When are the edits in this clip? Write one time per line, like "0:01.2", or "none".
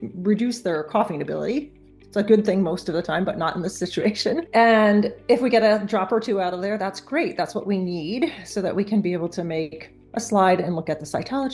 none

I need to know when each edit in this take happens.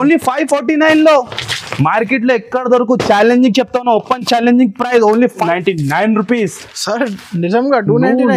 0:05.5

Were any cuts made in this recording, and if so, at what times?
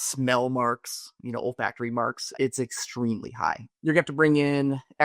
0:02.3
0:03.7

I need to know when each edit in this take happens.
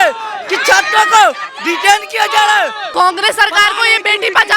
0:02.8

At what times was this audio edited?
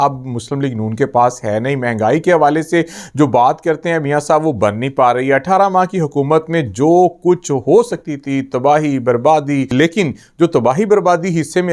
0:09.7

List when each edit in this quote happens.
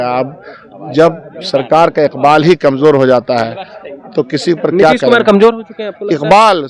none

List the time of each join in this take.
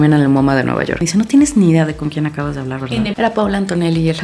0:00.9
0:03.1

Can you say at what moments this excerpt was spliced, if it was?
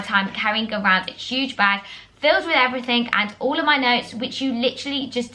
none

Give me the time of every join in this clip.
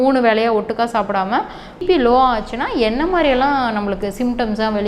0:01.8

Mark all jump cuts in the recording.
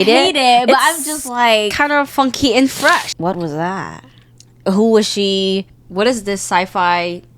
0:03.1
0:04.5
0:05.8

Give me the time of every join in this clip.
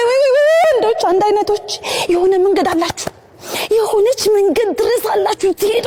none

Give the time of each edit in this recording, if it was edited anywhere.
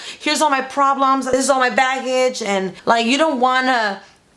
0:01.3
0:02.7

